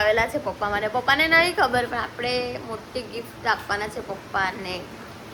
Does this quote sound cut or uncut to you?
uncut